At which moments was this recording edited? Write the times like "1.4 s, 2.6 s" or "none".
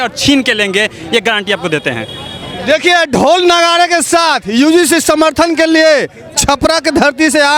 none